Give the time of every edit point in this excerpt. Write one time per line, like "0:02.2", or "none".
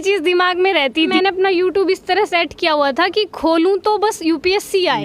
0:01.1